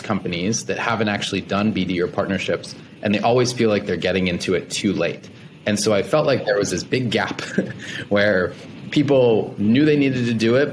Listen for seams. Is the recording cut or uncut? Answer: uncut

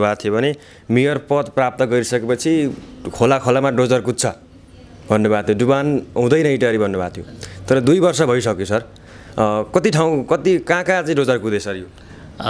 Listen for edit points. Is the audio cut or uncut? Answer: uncut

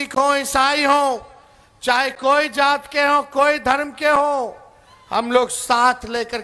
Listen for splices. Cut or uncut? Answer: uncut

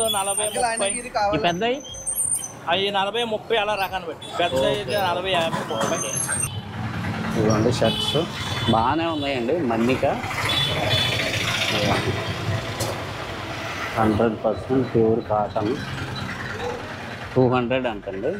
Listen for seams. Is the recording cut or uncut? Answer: cut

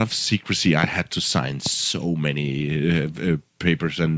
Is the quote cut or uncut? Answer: uncut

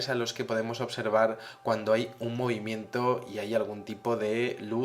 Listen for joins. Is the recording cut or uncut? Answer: cut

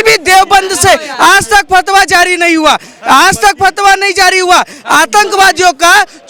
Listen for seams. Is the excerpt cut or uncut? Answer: uncut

